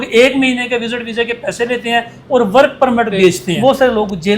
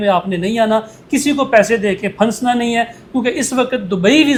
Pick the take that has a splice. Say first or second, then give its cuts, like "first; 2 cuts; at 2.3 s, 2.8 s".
first; 1 cut; at 3.5 s